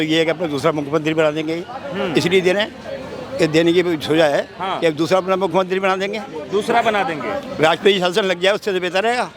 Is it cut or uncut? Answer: uncut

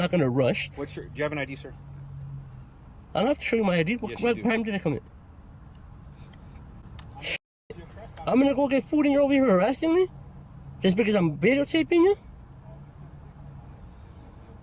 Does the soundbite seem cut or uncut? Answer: uncut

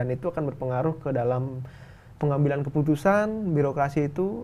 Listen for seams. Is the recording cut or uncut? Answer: uncut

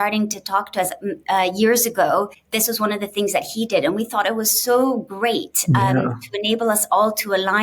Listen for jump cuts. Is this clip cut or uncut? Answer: cut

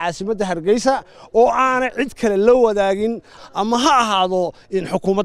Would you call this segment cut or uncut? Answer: cut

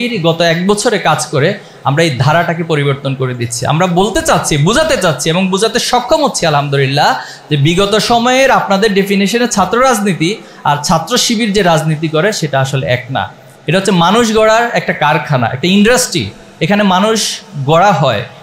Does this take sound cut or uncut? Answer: uncut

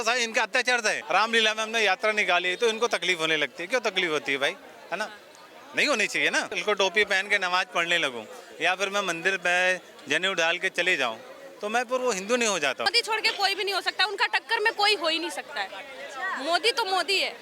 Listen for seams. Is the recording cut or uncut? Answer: cut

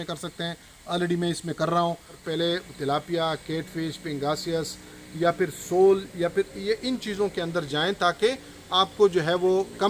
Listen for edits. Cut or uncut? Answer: cut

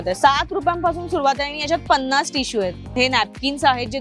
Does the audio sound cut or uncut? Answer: cut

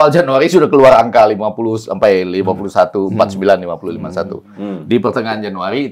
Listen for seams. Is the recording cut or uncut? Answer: uncut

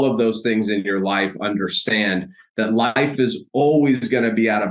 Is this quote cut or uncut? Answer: uncut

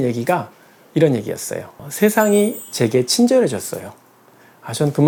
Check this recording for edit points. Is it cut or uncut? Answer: uncut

